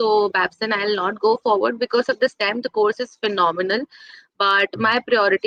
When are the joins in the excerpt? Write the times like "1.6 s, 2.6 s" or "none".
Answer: none